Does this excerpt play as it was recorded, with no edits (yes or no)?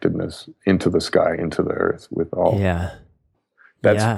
yes